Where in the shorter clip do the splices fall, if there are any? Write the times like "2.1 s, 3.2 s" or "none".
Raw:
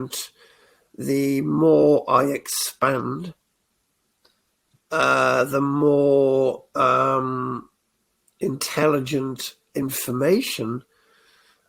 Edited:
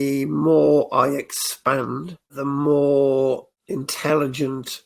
2.4 s, 3.5 s